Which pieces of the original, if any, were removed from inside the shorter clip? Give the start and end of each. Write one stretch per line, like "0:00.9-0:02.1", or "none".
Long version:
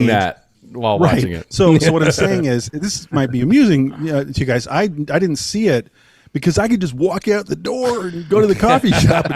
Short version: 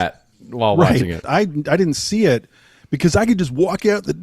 0:01.5-0:04.7